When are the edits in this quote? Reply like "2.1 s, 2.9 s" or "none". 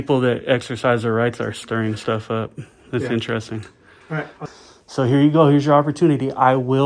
4.4 s